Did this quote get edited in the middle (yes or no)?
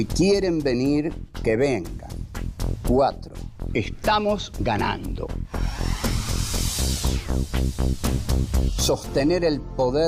yes